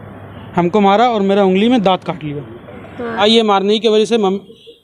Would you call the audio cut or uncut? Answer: cut